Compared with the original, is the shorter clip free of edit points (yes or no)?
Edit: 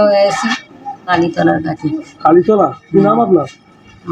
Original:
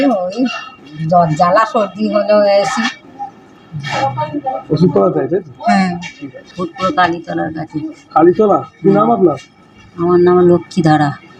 no